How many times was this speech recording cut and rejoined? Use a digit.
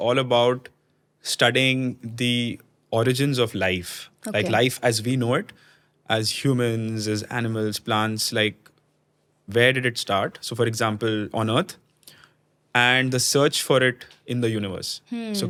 0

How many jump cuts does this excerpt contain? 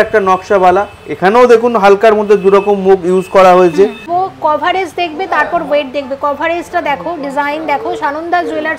1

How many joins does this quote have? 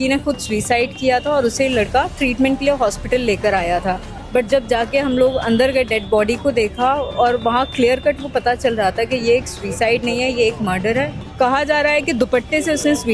2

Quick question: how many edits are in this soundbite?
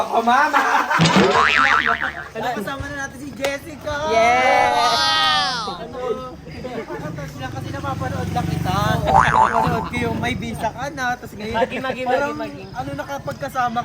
1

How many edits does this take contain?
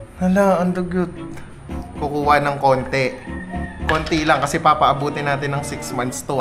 1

